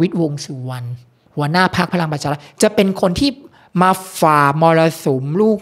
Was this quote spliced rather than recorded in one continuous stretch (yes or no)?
no